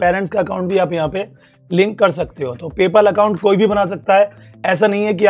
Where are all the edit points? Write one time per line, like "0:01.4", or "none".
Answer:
none